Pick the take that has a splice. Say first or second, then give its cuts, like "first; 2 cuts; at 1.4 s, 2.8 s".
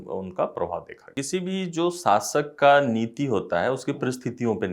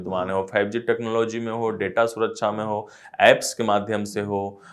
first; 1 cut; at 1.2 s